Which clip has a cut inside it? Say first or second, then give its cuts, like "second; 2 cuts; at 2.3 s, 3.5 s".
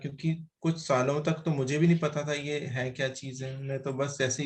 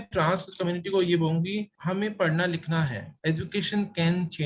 second; 2 cuts; at 1.7 s, 3.1 s